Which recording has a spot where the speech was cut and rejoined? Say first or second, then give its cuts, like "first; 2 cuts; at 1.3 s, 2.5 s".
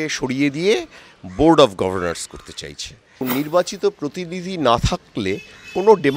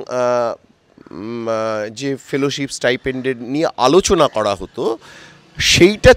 first; 1 cut; at 3.2 s